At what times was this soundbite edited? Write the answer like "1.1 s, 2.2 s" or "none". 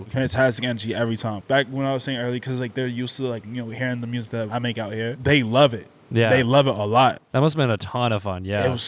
none